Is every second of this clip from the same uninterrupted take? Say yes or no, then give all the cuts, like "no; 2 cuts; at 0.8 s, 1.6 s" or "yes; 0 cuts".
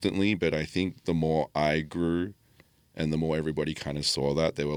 yes; 0 cuts